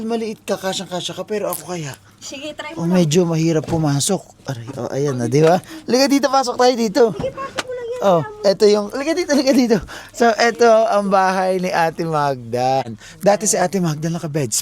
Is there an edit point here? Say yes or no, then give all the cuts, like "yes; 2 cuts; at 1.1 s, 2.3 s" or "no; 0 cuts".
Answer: no; 0 cuts